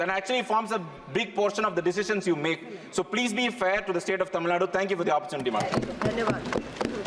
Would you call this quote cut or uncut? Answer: uncut